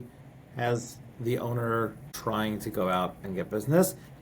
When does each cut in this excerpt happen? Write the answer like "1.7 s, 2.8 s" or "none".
2.1 s